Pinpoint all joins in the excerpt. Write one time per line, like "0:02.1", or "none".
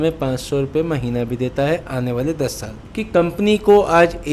none